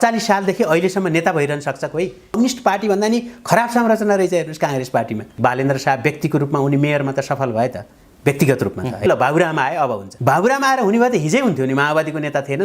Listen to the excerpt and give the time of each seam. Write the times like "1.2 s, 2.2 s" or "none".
5.3 s, 9.1 s